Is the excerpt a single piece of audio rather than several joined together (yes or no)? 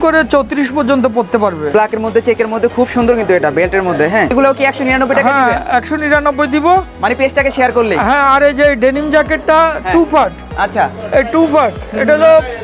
no